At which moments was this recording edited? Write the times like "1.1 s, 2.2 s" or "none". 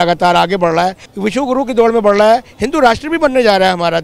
1.0 s